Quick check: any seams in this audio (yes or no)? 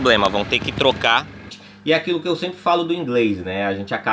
yes